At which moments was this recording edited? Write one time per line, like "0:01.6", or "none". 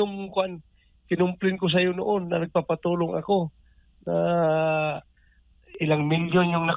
none

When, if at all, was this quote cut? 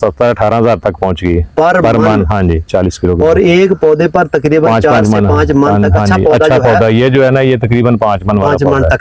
none

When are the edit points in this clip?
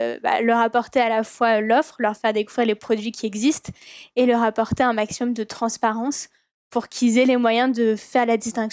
none

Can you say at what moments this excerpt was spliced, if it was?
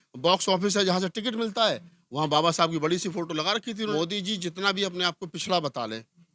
0:03.9

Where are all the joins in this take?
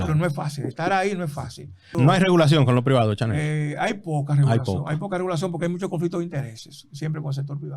0:01.9

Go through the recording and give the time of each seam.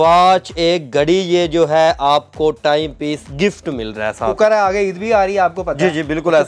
0:04.4

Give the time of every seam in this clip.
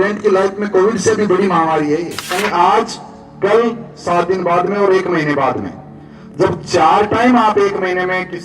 0:02.2

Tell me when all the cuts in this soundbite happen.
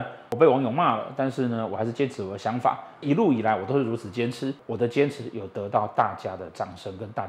0:03.0
0:04.6

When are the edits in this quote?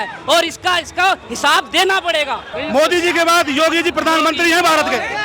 0:02.5

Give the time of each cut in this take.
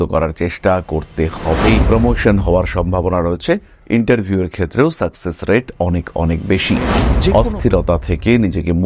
0:01.8
0:07.3

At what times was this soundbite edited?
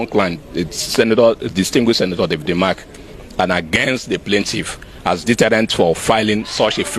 none

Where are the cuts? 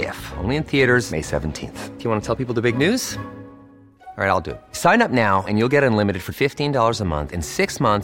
none

